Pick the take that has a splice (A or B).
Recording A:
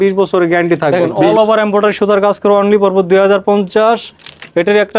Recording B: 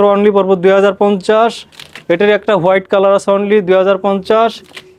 A